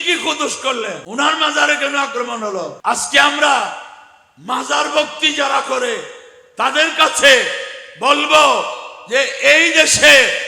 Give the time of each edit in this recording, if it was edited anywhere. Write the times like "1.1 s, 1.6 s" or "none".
1.0 s, 2.7 s